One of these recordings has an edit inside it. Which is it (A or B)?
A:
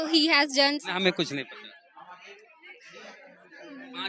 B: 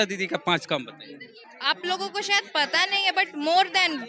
B